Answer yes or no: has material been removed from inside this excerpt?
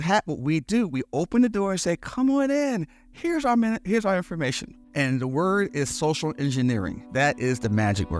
yes